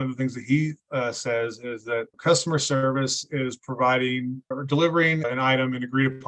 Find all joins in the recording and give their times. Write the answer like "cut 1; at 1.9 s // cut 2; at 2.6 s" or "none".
cut 1; at 2.1 s // cut 2; at 4.5 s // cut 3; at 5.2 s